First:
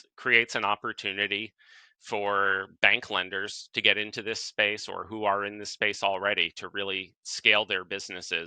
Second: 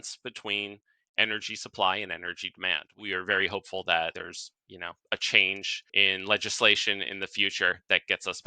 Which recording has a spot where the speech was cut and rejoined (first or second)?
second